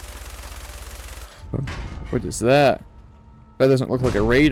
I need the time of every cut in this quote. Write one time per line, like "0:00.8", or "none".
0:01.4